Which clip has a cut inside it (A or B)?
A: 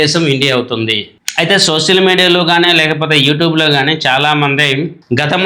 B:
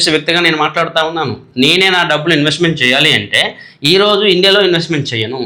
A